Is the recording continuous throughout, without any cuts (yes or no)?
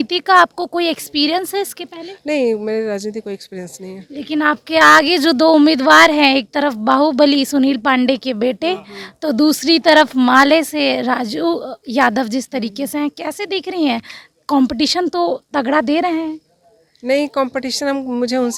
yes